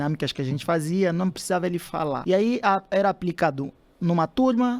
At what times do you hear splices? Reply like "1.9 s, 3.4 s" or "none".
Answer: 2.2 s